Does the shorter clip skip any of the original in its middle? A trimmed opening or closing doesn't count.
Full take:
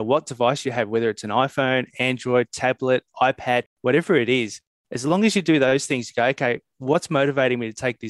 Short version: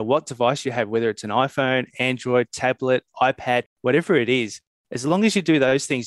no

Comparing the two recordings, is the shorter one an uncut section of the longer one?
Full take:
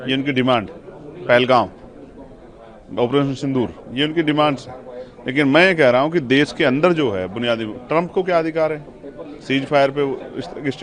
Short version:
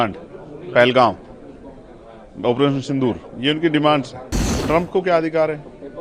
no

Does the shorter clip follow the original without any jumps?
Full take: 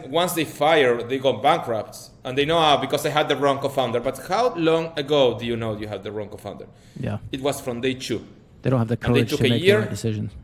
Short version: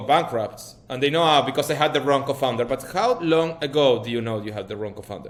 yes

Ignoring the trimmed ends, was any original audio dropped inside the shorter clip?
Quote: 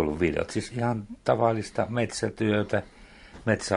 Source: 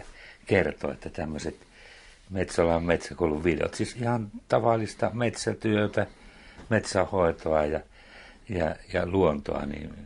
no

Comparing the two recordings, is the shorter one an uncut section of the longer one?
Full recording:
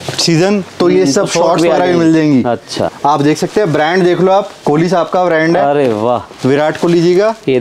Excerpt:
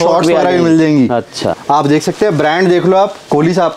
yes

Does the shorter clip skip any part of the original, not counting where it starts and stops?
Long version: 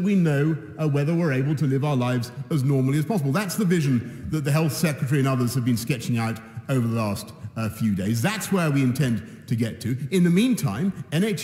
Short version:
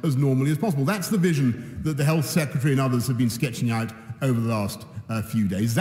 no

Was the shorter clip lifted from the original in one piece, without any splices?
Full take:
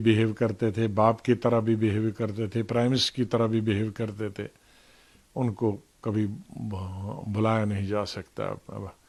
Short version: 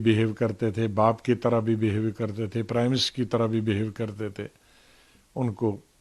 yes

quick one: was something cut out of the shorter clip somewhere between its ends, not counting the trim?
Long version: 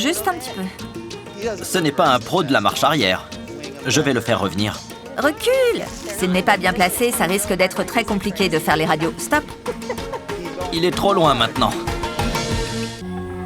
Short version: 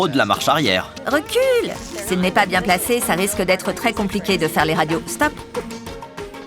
yes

